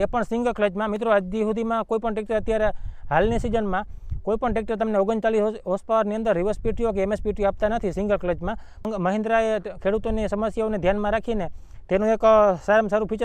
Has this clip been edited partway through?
no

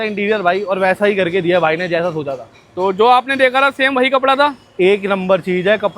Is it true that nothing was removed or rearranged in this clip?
yes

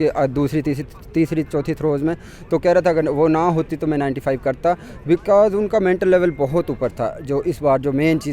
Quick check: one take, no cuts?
yes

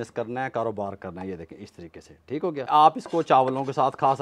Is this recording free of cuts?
no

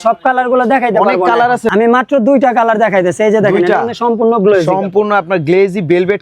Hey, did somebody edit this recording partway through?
yes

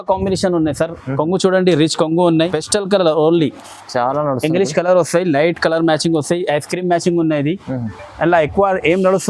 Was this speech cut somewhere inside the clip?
yes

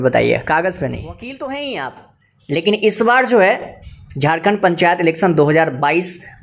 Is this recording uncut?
no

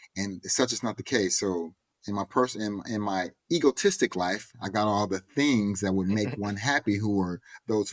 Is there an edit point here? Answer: no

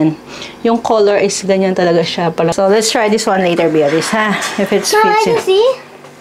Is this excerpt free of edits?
no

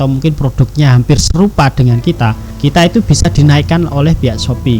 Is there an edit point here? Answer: yes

